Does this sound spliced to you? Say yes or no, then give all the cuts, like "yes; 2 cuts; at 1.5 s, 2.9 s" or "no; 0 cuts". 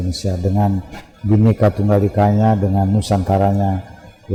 no; 0 cuts